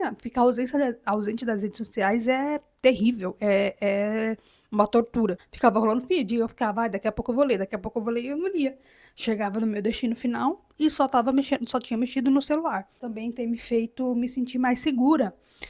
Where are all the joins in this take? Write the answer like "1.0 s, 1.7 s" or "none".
5.4 s, 13.0 s

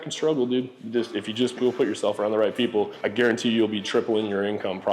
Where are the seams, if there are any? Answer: 3.0 s

